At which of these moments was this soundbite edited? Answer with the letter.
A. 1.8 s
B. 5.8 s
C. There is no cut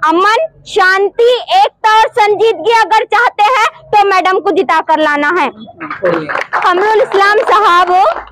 C